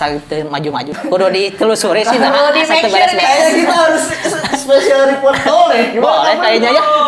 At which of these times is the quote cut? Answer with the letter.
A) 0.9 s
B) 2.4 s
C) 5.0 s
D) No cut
A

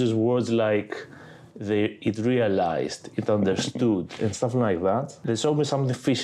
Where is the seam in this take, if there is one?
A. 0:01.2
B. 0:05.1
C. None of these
B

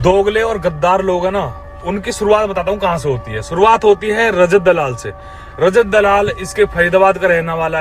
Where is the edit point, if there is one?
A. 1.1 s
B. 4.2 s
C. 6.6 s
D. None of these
D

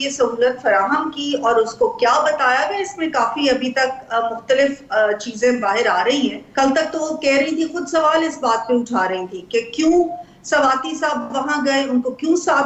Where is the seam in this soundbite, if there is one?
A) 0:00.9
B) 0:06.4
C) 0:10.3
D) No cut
B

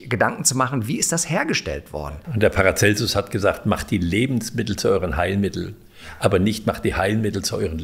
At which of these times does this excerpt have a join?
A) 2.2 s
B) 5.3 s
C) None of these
A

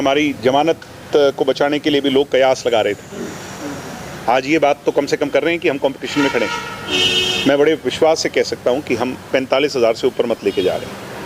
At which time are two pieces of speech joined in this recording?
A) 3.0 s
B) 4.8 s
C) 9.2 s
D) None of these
D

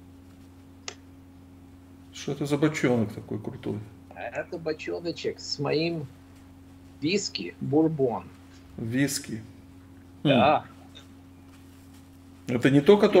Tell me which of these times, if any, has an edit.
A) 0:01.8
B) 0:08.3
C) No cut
C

